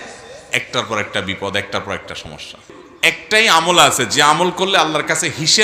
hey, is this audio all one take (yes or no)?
no